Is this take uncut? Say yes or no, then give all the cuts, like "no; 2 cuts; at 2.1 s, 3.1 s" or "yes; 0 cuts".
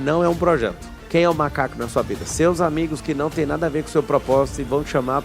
no; 1 cut; at 1.0 s